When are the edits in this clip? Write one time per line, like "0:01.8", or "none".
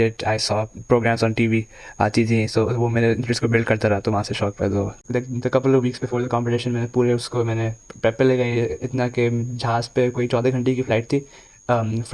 0:05.0